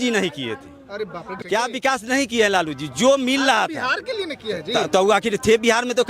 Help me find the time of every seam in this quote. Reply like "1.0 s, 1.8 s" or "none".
1.3 s